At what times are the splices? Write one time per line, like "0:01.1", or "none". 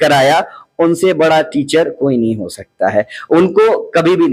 none